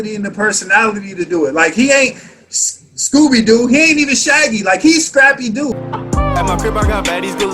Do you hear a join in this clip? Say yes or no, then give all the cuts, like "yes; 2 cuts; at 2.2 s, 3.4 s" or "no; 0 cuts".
yes; 1 cut; at 5.7 s